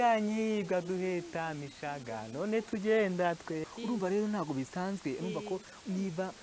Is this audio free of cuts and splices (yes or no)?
no